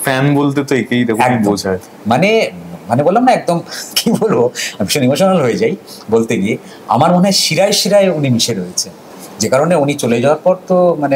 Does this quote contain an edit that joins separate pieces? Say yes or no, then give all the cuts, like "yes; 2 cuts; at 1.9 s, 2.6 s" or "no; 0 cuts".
no; 0 cuts